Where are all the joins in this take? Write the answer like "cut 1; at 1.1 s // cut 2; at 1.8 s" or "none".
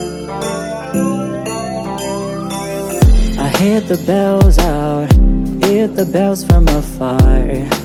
none